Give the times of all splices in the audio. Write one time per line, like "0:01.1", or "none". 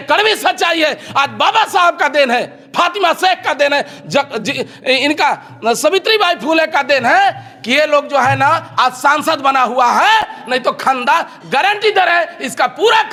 none